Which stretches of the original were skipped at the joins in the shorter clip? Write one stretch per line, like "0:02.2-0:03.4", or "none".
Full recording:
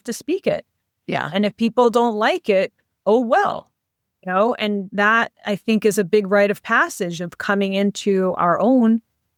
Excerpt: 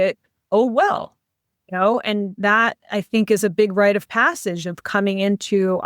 none